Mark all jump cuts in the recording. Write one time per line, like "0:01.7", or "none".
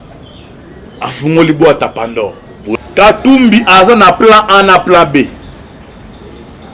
0:02.6